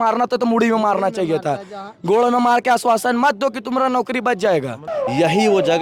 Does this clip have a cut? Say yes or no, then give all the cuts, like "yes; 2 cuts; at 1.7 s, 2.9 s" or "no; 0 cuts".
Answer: yes; 1 cut; at 4.8 s